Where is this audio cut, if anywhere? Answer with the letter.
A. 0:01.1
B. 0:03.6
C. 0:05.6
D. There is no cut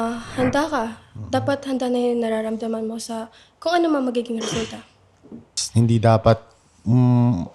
C